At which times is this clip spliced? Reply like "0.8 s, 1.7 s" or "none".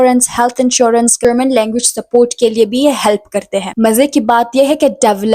1.2 s, 3.7 s

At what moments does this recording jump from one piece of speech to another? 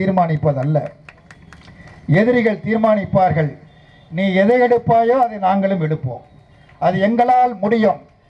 none

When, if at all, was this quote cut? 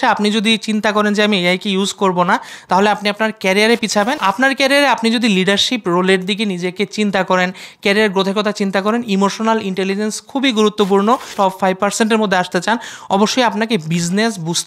4.2 s, 11.3 s

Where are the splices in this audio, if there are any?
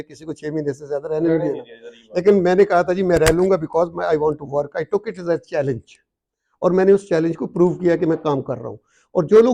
none

